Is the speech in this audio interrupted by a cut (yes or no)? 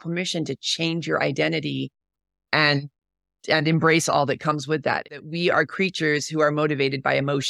yes